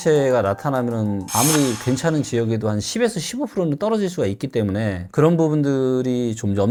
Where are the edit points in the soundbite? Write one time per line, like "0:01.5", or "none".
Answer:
none